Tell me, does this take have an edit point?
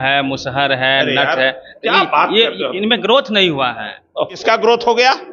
yes; 1 cut; at 4.4 s

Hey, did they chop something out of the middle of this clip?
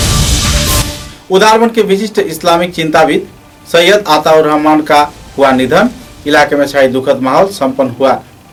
no; 0 cuts

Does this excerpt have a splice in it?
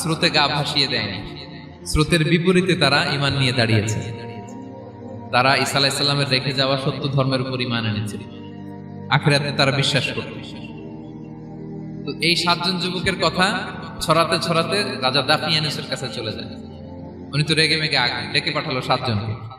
yes; 2 cuts; at 10.8 s, 12.0 s

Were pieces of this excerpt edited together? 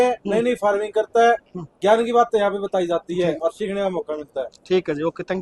no; 0 cuts

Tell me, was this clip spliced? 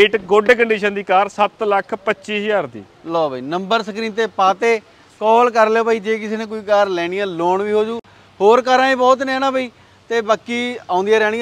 no; 0 cuts

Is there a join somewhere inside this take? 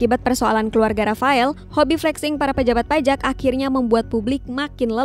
no; 0 cuts

